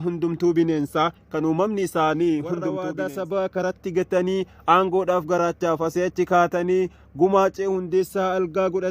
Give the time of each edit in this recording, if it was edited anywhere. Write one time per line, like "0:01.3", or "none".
0:02.8